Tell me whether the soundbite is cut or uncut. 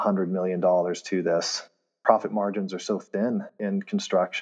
cut